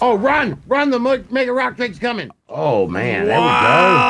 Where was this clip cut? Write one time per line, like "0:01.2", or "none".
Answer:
0:02.3